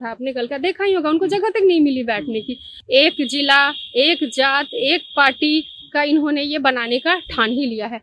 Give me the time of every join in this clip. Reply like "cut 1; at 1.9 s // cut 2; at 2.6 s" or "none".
cut 1; at 2.7 s